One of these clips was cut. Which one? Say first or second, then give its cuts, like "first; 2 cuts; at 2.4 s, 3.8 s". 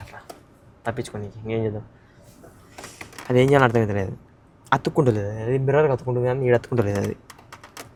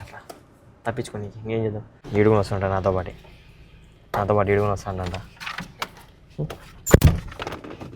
second; 1 cut; at 2.0 s